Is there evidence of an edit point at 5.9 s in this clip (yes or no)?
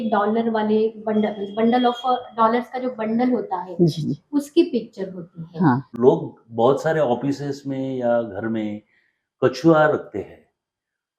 yes